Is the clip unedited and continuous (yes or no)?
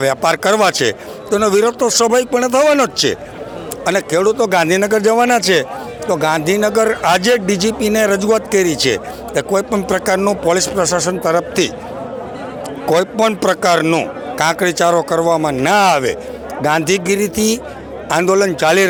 yes